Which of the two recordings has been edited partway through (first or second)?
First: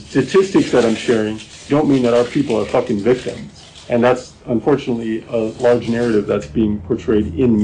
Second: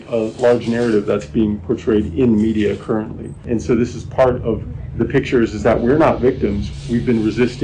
second